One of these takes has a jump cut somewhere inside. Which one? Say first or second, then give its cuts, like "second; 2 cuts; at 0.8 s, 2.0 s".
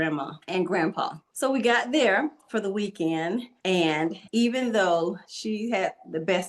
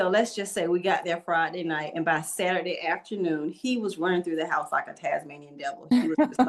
first; 3 cuts; at 1.2 s, 3.9 s, 5.3 s